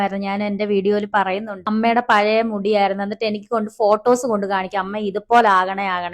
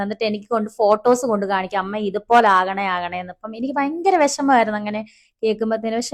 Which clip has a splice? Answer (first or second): first